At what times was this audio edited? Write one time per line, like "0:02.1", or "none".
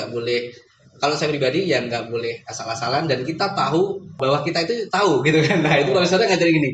0:04.2

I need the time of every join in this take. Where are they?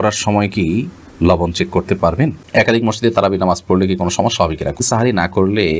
0:02.4
0:04.8

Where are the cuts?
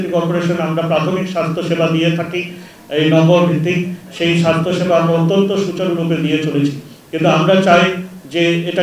none

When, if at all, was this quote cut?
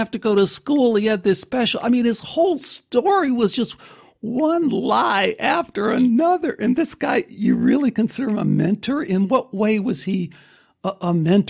none

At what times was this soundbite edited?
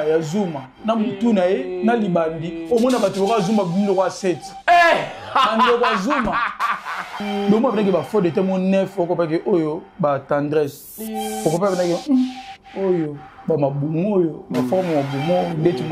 0:07.2

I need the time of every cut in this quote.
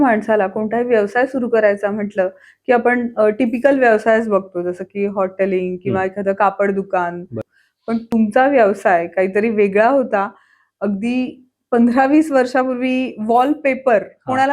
0:07.7

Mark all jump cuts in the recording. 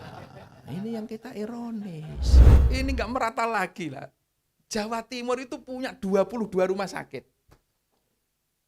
0:02.5

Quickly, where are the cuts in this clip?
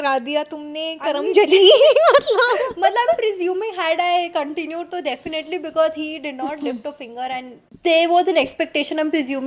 0:07.7

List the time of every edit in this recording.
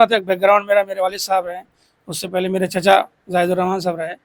none

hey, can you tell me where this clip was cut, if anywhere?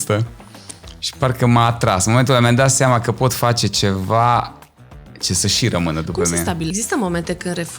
0:06.7

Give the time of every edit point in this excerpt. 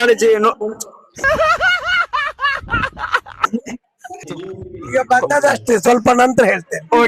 0:04.3

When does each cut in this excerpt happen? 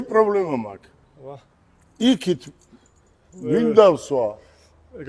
none

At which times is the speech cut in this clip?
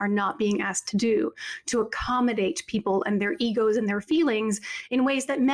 none

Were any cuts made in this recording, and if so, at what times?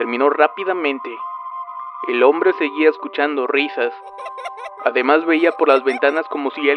0:02.5

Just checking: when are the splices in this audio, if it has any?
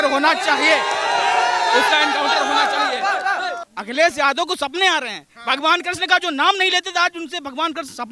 0:03.6

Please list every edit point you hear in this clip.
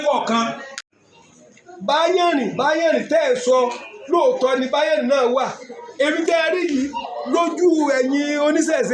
0:01.0

